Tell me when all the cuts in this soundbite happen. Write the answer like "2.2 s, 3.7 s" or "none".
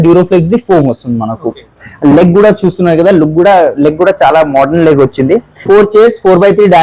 5.6 s